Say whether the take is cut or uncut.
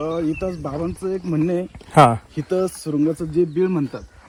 uncut